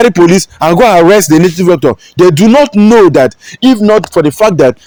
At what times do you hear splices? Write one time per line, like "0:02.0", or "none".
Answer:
none